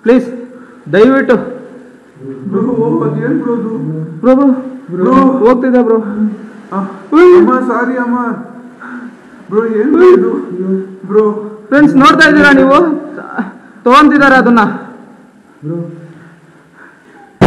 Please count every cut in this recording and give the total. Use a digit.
0